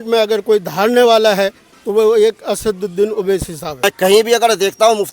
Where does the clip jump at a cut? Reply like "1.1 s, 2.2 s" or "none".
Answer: 3.8 s